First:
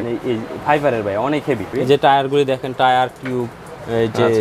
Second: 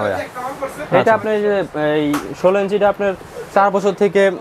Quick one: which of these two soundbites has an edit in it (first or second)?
first